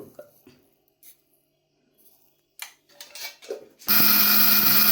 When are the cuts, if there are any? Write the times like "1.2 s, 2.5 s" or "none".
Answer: none